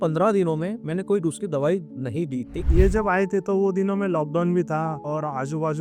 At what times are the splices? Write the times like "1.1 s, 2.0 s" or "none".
2.6 s, 5.0 s